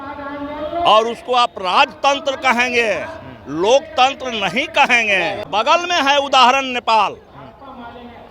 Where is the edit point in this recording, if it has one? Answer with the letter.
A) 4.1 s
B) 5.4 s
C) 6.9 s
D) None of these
B